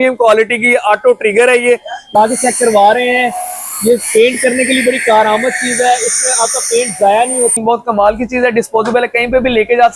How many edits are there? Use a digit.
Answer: 2